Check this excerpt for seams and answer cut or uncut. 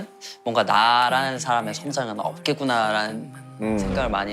uncut